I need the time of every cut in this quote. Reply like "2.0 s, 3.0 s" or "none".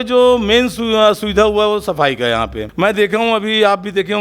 2.6 s